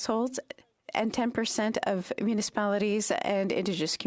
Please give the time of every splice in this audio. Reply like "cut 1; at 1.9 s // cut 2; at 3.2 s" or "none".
none